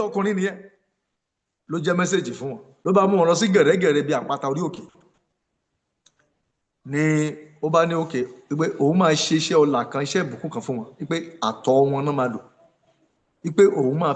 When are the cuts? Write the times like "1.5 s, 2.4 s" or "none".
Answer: 2.7 s